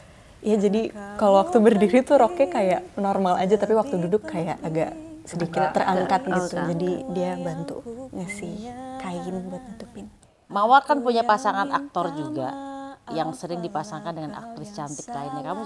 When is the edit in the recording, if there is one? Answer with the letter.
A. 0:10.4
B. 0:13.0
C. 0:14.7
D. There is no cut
A